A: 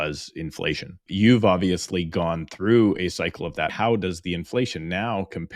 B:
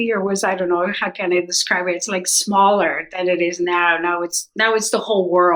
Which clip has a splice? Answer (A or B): A